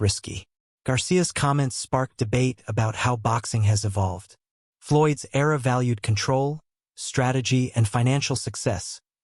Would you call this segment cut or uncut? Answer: uncut